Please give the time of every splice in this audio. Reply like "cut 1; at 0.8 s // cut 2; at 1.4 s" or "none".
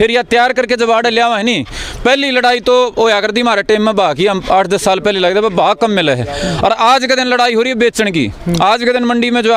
none